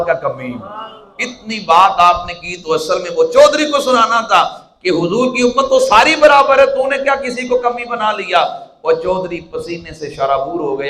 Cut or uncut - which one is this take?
uncut